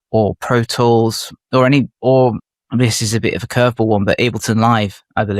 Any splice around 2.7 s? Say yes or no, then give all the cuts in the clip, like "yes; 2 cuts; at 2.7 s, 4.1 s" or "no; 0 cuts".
yes; 1 cut; at 2.7 s